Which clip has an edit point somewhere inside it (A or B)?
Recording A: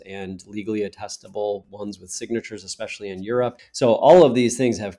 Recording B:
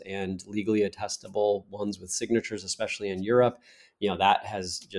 A